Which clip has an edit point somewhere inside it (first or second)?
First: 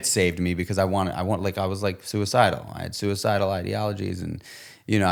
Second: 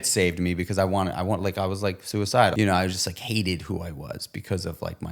second